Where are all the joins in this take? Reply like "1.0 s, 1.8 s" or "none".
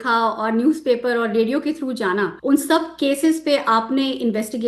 2.3 s